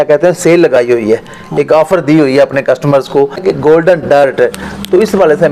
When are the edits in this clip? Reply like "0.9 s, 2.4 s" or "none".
3.4 s